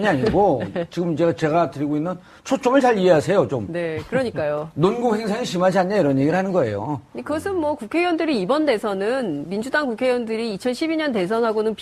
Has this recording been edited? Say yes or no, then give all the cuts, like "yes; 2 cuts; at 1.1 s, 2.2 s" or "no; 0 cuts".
yes; 1 cut; at 4.8 s